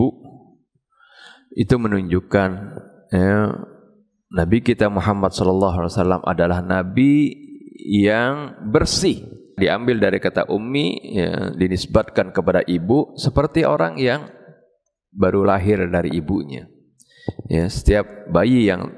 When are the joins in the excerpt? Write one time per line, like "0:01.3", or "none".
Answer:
0:09.6